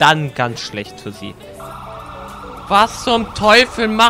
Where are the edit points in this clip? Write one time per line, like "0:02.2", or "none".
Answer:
0:01.6